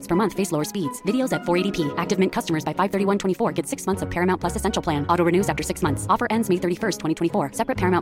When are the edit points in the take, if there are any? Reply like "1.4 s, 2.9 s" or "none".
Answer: none